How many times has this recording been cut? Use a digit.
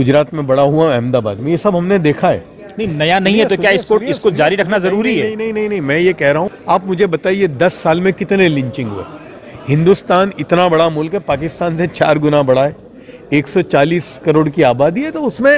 1